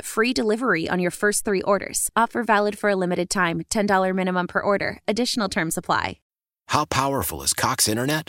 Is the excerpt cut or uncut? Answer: cut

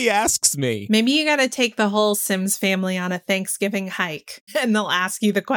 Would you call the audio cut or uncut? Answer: cut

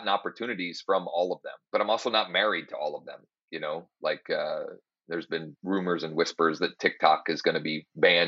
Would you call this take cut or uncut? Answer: cut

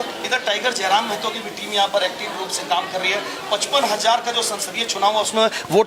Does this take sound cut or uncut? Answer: uncut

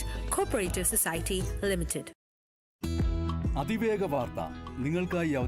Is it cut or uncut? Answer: cut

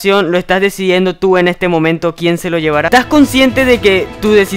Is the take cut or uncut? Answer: uncut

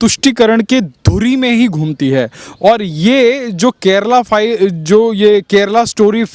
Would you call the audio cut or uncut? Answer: uncut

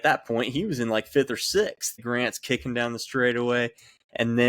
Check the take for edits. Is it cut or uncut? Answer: cut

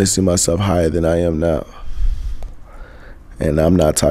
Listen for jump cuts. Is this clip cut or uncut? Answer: uncut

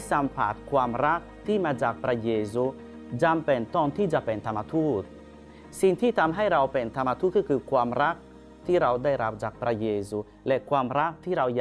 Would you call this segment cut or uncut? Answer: uncut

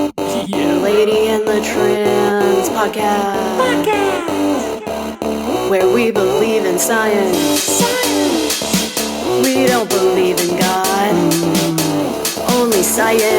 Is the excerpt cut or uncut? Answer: uncut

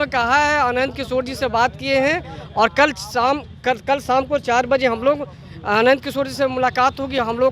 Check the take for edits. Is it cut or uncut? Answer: uncut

